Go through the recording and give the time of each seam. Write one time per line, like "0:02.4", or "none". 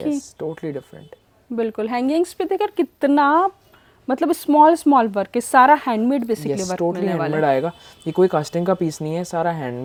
none